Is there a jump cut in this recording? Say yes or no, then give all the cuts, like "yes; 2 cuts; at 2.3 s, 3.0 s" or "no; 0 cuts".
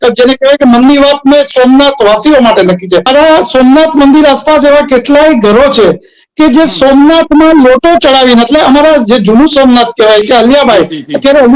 yes; 1 cut; at 3.1 s